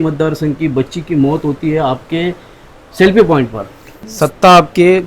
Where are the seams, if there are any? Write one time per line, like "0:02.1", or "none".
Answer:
0:04.0